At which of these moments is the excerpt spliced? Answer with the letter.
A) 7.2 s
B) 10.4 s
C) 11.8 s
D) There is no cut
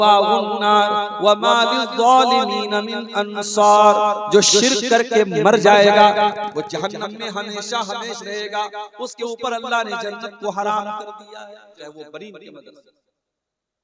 C